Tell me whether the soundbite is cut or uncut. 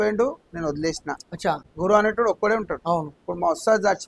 cut